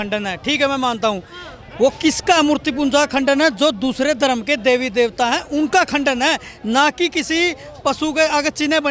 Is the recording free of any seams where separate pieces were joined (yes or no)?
yes